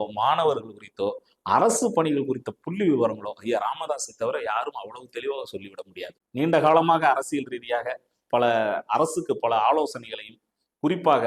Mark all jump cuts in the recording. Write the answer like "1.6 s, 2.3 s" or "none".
6.2 s